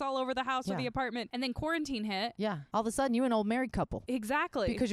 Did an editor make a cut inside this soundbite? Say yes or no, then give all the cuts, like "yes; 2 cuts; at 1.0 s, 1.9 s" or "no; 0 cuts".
yes; 3 cuts; at 1.3 s, 2.6 s, 4.0 s